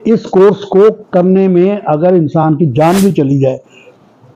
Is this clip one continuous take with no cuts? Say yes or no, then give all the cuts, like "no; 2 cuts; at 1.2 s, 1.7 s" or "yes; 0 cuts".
yes; 0 cuts